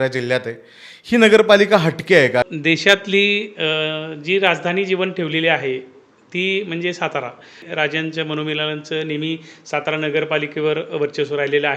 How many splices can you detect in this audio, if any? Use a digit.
2